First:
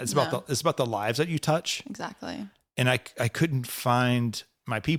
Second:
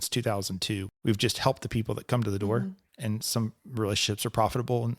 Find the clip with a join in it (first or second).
second